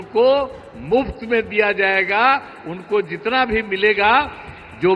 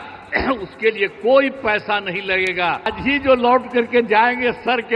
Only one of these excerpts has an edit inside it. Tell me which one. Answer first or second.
second